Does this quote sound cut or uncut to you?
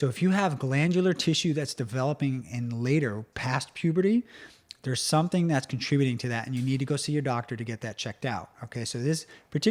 uncut